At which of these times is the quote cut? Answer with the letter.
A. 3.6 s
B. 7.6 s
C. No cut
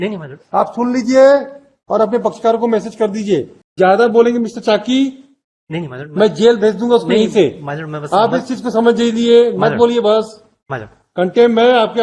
A